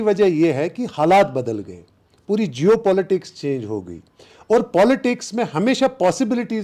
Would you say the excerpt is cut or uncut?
uncut